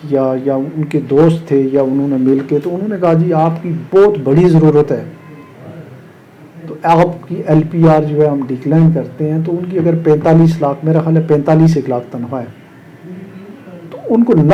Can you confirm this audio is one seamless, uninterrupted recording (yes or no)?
yes